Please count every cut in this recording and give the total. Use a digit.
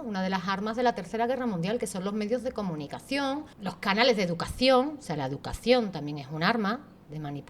1